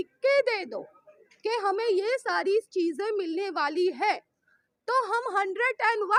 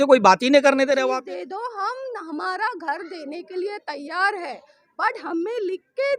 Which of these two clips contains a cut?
second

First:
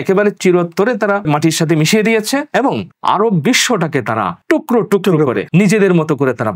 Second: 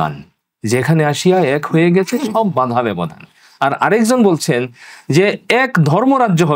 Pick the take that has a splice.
first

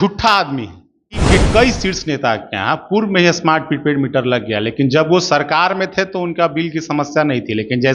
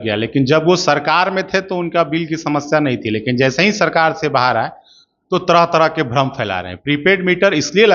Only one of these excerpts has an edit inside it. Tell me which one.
first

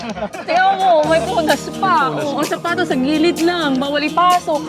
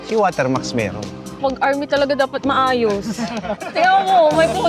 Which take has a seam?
second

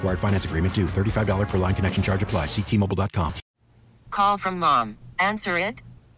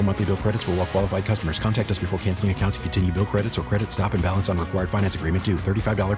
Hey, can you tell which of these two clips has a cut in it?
first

